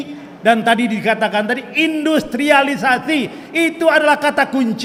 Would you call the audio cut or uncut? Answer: uncut